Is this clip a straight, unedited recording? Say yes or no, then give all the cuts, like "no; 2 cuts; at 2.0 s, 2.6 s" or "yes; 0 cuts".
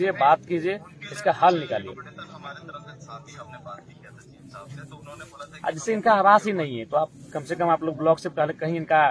yes; 0 cuts